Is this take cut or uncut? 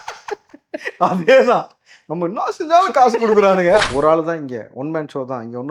cut